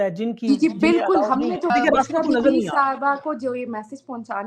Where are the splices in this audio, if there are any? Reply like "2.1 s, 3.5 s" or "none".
1.7 s